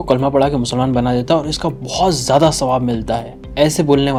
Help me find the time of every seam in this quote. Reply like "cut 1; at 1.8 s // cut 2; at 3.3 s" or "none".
none